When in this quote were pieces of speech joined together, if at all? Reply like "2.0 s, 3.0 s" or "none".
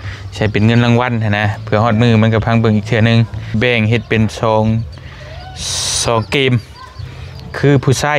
3.6 s